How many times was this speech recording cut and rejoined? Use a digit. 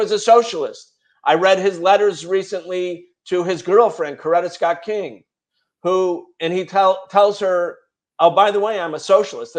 0